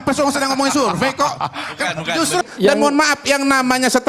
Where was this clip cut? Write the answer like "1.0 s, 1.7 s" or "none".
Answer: 2.5 s